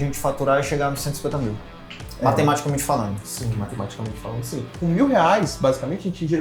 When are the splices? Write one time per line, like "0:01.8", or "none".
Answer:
0:04.7